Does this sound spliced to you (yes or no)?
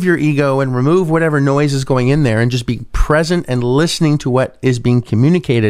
no